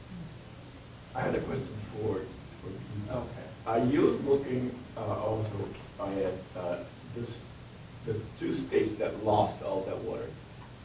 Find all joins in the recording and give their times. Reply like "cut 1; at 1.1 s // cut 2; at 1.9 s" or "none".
cut 1; at 9.1 s